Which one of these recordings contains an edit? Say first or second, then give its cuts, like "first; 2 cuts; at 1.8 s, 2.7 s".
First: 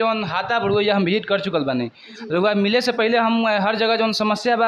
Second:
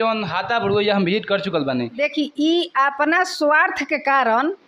second; 1 cut; at 2.0 s